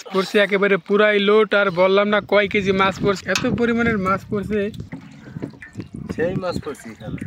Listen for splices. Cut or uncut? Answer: uncut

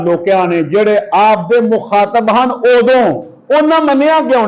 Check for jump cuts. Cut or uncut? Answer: uncut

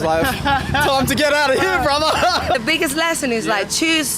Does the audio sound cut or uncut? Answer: cut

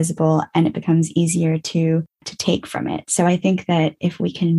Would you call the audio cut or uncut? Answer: cut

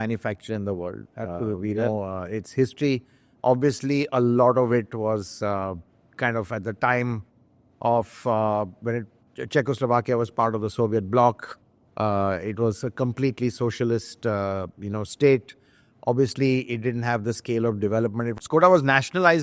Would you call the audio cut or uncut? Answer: uncut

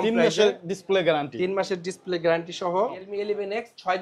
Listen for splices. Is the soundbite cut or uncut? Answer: cut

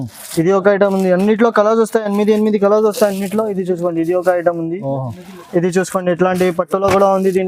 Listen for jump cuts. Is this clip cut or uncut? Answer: uncut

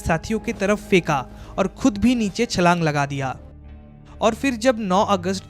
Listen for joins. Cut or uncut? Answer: uncut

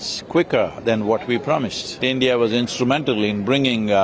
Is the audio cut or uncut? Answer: cut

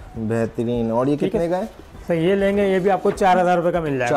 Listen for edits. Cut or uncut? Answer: uncut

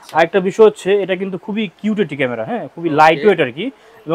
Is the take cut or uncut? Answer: uncut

